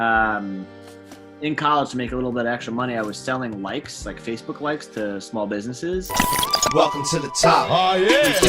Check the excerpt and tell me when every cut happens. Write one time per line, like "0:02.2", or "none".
0:06.1